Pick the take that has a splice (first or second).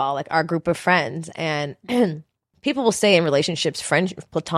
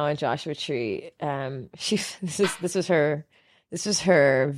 first